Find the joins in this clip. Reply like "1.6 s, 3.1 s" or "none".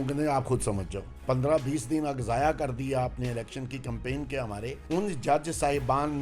1.2 s, 4.7 s